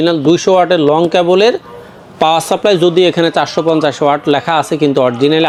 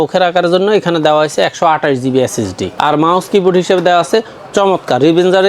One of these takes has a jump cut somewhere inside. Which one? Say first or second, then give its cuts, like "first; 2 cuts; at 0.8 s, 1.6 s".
second; 1 cut; at 2.6 s